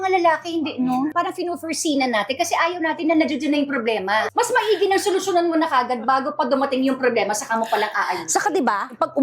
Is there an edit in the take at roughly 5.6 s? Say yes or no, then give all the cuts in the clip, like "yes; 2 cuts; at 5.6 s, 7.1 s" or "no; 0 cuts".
no; 2 cuts; at 1.1 s, 4.3 s